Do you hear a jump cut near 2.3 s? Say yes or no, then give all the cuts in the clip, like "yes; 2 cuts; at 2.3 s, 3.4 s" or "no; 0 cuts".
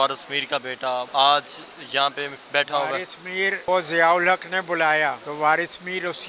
yes; 4 cuts; at 1.1 s, 2.3 s, 3.7 s, 5.2 s